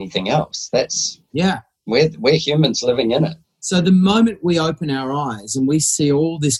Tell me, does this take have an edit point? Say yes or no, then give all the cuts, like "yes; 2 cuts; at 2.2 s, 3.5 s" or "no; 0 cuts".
no; 0 cuts